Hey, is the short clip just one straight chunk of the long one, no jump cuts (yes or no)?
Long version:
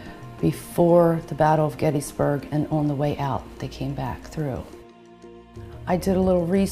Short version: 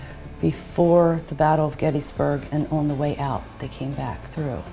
yes